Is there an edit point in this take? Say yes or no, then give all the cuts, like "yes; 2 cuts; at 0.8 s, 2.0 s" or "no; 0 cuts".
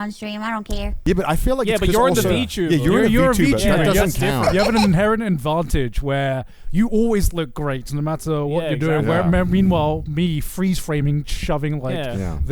yes; 1 cut; at 0.9 s